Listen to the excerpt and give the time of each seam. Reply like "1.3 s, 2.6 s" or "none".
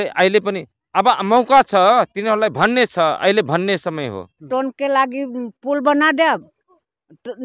4.5 s